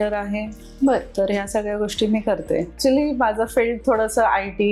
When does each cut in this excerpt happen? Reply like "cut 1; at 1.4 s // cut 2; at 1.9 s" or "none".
cut 1; at 2.7 s